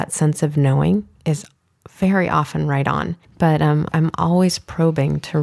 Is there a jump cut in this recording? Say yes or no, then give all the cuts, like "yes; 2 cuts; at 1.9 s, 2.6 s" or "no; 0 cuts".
yes; 2 cuts; at 3.2 s, 3.9 s